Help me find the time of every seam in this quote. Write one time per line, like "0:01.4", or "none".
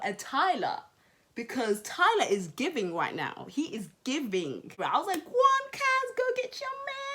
0:04.7

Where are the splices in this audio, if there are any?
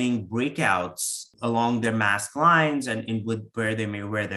0:01.3

